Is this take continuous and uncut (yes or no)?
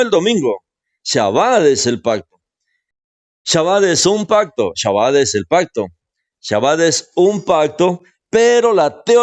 no